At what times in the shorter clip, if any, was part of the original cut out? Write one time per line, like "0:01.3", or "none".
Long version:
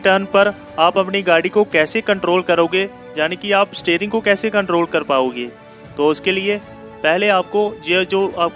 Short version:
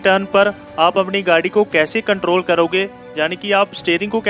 none